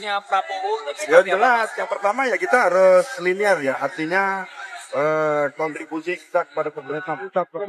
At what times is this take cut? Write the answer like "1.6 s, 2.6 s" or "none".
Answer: none